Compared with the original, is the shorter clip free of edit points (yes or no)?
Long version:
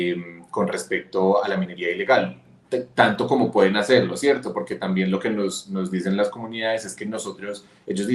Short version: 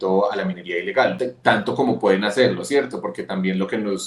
no